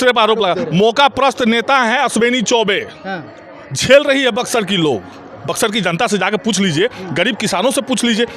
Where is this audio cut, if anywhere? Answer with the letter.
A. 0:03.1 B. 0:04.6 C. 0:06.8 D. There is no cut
D